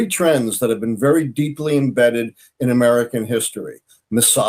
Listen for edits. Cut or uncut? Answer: uncut